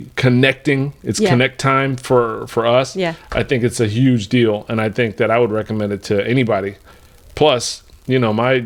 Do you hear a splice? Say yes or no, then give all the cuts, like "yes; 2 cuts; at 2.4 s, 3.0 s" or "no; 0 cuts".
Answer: no; 0 cuts